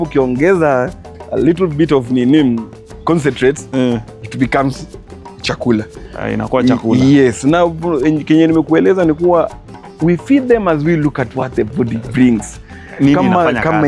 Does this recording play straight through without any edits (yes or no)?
yes